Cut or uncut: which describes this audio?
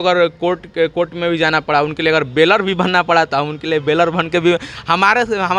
uncut